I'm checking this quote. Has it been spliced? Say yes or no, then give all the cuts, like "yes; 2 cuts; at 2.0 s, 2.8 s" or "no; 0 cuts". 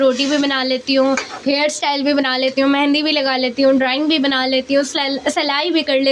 no; 0 cuts